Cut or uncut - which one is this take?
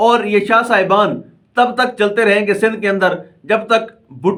uncut